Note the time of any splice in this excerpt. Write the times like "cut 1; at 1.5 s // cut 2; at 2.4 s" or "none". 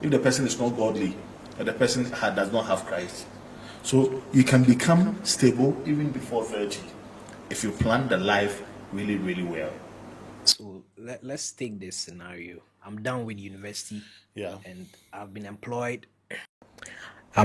none